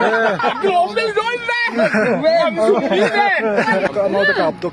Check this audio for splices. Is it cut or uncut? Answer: uncut